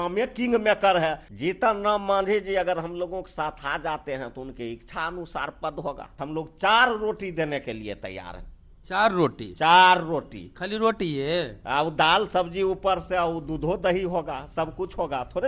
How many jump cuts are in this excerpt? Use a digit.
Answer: 2